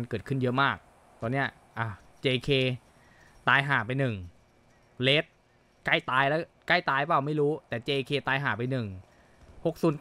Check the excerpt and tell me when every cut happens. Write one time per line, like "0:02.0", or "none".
none